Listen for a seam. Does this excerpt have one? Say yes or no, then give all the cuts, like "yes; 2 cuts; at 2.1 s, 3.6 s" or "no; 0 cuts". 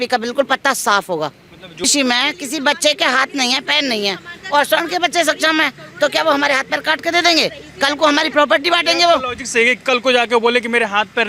yes; 1 cut; at 1.8 s